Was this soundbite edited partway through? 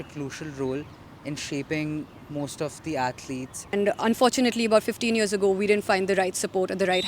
yes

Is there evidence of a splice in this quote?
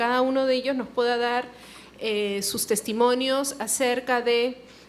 yes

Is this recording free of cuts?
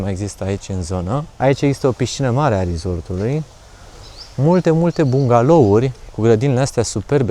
yes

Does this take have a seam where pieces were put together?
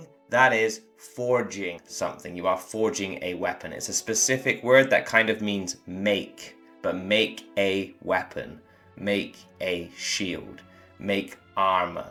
no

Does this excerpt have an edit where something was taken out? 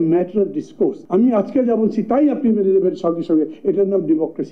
no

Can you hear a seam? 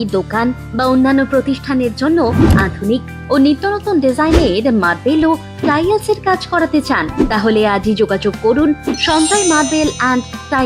no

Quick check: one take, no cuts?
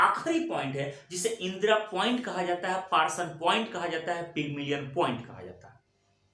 yes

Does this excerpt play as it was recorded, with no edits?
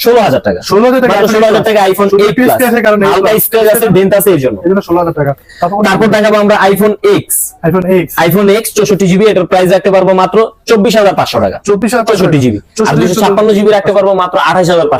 yes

